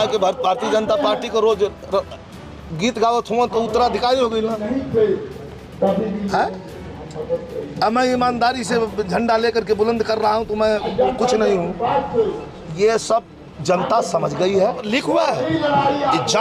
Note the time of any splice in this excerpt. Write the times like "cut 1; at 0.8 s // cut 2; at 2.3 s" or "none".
cut 1; at 14.8 s

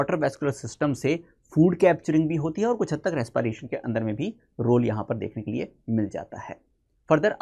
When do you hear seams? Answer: none

